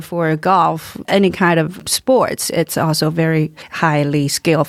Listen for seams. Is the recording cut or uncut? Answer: uncut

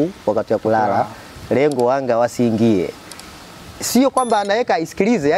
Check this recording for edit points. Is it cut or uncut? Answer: uncut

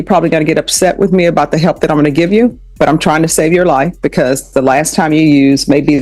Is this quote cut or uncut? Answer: uncut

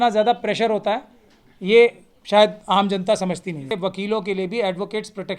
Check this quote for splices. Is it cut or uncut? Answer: cut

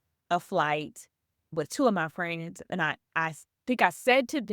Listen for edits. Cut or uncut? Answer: cut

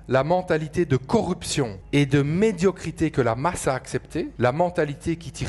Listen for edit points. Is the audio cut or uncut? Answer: cut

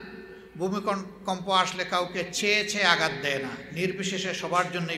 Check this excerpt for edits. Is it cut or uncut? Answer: uncut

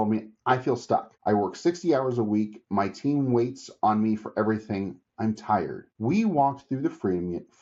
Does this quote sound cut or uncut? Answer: cut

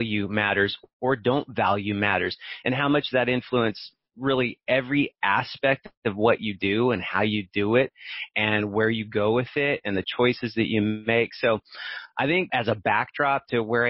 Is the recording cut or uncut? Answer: cut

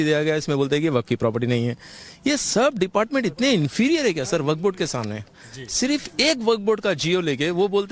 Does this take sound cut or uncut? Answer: uncut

